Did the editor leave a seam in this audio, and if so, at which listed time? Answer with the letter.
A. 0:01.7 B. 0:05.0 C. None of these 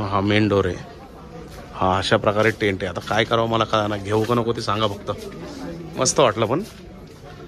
C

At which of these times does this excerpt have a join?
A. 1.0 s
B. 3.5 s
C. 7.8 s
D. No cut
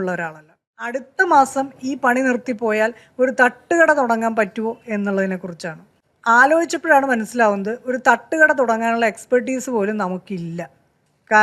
A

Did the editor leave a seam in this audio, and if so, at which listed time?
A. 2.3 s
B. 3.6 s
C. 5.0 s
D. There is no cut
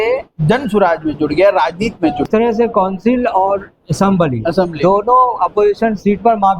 A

